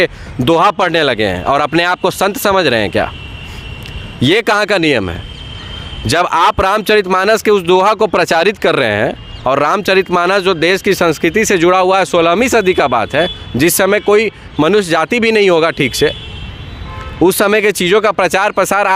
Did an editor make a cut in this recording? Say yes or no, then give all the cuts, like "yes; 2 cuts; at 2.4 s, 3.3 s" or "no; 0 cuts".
no; 0 cuts